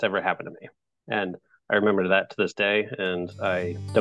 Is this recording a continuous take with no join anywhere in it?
yes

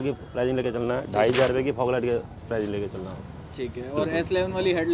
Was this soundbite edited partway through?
no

